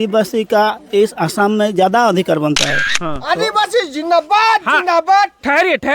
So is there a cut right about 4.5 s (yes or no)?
no